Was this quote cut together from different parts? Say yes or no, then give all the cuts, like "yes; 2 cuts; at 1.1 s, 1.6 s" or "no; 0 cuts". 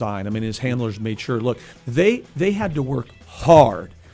yes; 1 cut; at 1.7 s